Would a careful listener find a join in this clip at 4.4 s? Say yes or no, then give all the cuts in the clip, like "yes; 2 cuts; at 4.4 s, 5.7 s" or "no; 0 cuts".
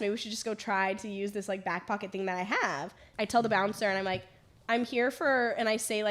no; 1 cut; at 3.0 s